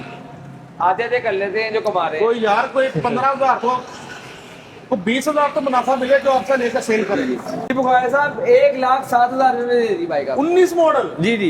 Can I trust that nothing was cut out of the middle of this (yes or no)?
no